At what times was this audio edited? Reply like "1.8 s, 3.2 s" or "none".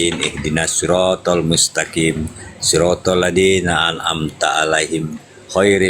none